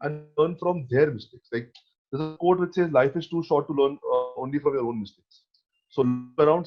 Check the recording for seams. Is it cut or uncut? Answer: uncut